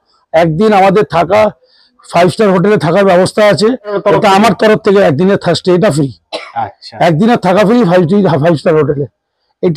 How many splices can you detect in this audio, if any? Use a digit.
1